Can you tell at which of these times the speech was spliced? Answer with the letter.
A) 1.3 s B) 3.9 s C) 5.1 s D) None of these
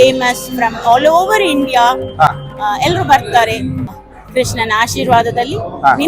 B